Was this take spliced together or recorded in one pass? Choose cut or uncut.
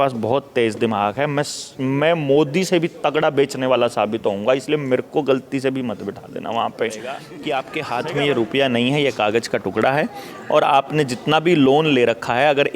cut